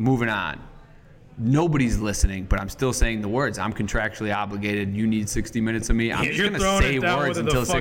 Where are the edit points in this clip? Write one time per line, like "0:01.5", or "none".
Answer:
none